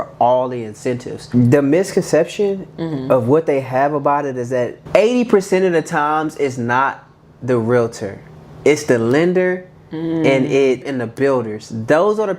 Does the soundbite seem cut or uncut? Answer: cut